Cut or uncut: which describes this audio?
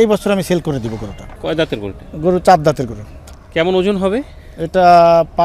cut